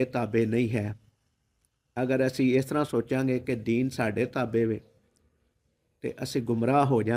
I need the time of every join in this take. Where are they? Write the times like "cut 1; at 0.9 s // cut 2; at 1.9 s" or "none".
none